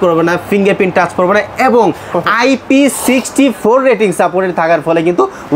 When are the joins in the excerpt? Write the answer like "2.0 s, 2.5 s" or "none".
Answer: none